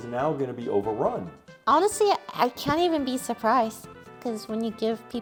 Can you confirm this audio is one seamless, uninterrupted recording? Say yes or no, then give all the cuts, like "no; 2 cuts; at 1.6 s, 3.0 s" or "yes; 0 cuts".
yes; 0 cuts